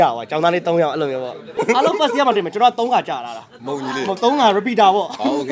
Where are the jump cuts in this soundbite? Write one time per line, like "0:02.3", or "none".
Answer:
0:01.5